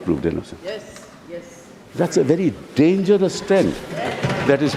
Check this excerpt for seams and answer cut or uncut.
uncut